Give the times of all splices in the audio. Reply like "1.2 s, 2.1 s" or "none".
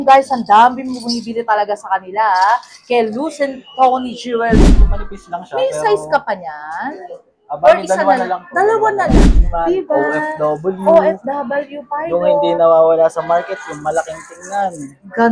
4.8 s, 9.1 s